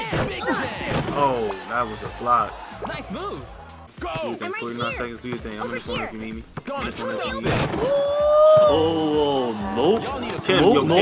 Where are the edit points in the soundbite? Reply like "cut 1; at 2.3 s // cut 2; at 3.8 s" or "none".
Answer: none